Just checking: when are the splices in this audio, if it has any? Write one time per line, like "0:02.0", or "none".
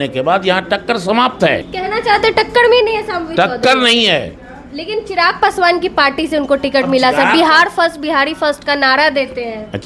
0:01.7

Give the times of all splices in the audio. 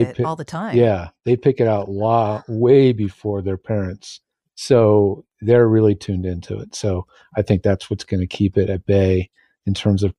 none

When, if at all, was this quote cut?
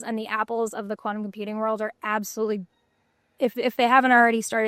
none

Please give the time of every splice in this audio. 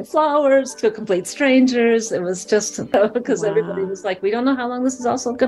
0:02.9

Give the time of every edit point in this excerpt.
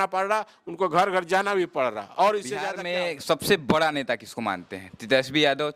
0:02.8

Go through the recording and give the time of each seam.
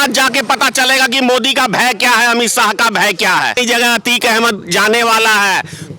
0:03.6

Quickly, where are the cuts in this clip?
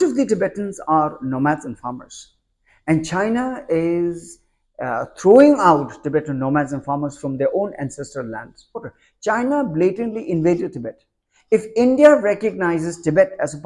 0:08.9

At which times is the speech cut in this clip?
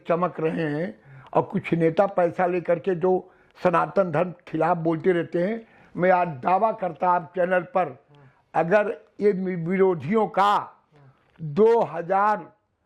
none

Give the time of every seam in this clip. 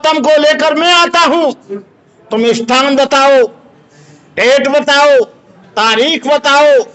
none

